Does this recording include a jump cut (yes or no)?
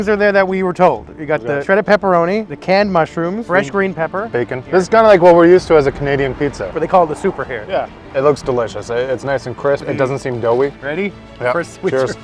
yes